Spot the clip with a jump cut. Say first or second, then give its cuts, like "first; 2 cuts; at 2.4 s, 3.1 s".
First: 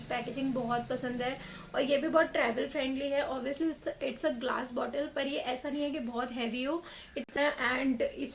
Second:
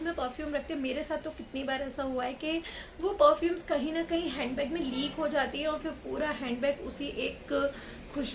first; 1 cut; at 7.3 s